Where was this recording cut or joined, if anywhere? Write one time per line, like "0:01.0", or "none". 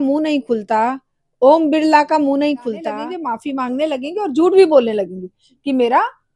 0:03.1